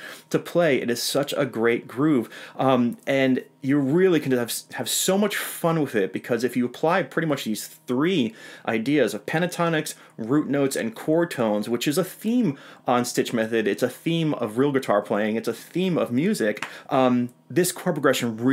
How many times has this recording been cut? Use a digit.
0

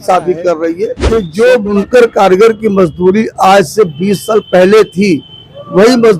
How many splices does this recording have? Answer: 1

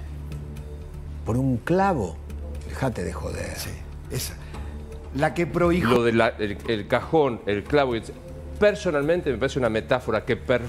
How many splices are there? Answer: 1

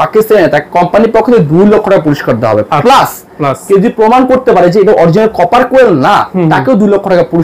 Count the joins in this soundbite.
0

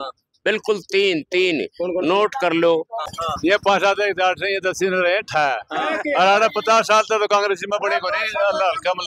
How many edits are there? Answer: 1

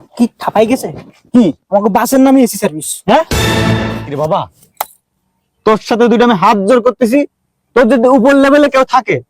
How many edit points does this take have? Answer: 1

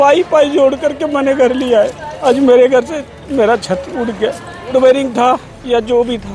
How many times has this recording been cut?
2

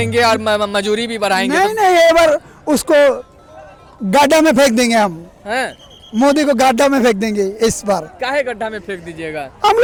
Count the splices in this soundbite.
0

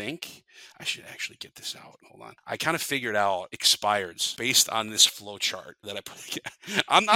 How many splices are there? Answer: 4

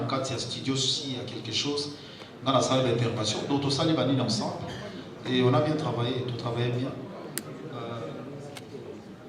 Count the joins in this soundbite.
0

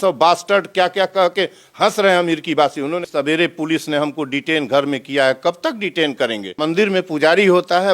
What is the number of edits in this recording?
2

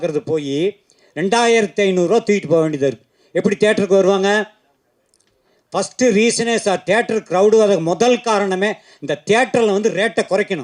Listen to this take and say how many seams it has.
0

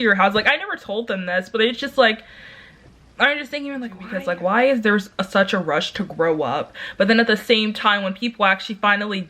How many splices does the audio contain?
1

